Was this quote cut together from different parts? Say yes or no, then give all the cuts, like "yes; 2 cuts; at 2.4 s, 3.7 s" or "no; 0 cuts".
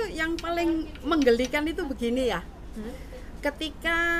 no; 0 cuts